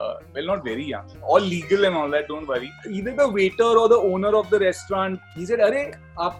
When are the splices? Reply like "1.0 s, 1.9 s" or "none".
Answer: 2.9 s, 5.2 s